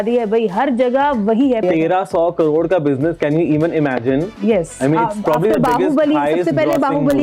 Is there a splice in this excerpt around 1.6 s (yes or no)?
yes